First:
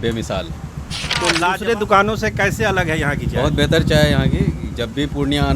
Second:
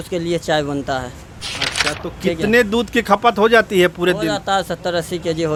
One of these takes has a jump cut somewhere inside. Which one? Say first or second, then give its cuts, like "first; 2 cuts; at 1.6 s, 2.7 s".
first; 1 cut; at 1.4 s